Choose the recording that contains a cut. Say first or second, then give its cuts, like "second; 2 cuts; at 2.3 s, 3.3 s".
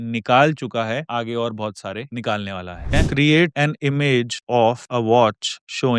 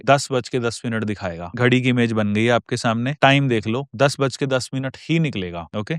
first; 1 cut; at 2.9 s